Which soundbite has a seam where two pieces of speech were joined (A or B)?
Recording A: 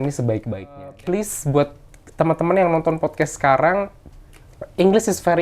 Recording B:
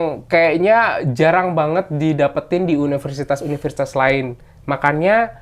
A